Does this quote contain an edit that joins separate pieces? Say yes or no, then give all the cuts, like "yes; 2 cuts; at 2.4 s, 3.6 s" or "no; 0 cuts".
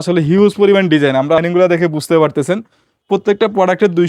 yes; 1 cut; at 1.4 s